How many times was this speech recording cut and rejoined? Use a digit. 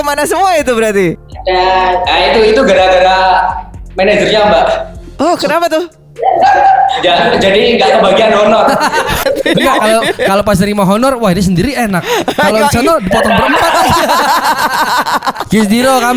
3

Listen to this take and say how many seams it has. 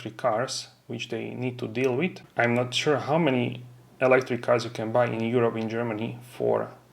1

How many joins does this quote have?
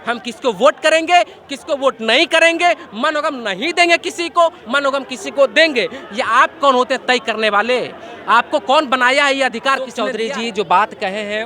1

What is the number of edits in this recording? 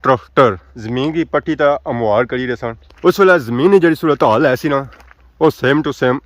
1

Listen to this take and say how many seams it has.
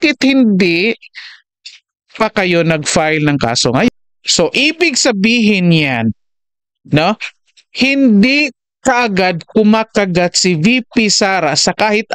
1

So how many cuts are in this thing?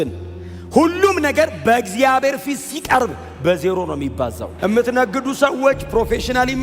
1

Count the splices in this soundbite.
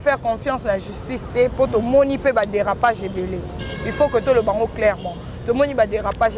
0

